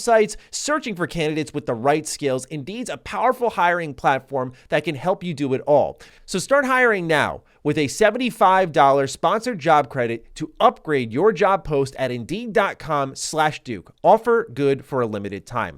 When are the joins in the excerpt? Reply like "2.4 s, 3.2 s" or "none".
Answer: 6.1 s